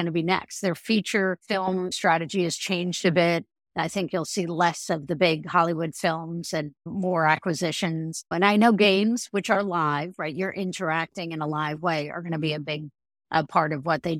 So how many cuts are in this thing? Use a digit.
3